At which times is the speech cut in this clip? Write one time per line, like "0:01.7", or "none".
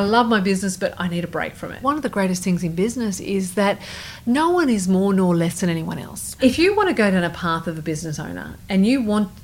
0:01.8
0:06.3